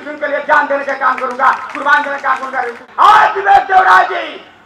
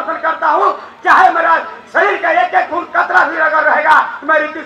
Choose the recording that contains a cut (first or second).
first